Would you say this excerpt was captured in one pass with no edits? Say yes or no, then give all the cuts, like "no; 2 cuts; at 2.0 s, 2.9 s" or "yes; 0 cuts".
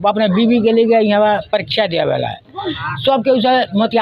yes; 0 cuts